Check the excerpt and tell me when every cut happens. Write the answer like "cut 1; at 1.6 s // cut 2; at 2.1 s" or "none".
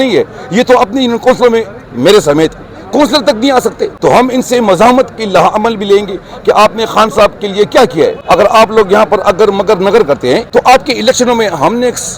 cut 1; at 3.9 s // cut 2; at 8.2 s // cut 3; at 10.4 s